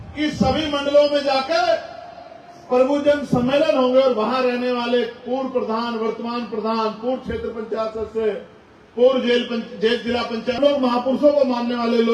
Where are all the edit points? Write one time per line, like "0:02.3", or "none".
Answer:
0:10.6